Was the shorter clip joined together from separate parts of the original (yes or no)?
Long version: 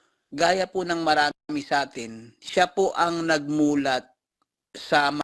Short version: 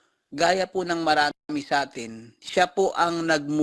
no